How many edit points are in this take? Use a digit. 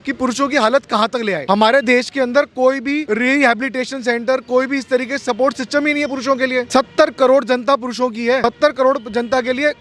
4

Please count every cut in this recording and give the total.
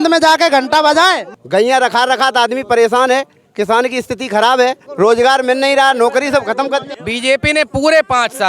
3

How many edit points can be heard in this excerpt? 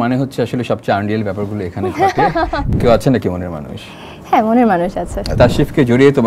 2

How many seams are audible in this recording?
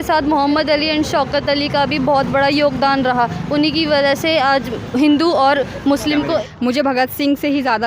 1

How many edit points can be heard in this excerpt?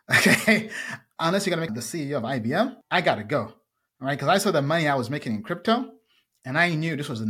2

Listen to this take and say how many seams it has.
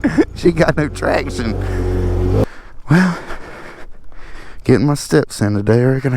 1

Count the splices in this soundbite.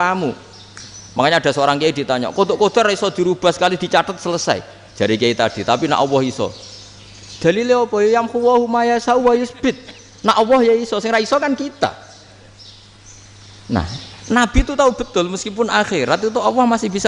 0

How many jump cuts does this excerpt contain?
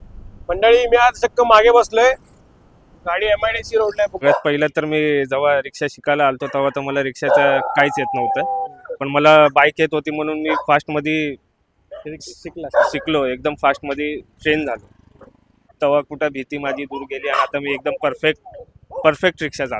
2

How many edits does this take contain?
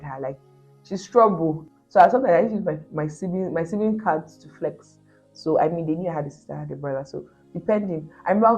1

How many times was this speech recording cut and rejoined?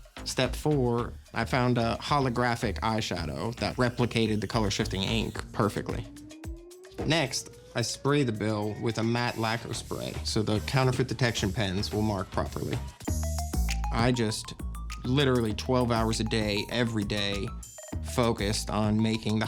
1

